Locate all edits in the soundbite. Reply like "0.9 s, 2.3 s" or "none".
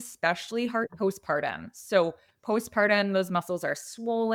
none